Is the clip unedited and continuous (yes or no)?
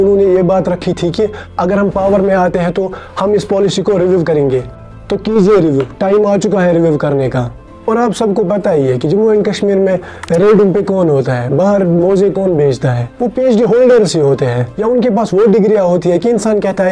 no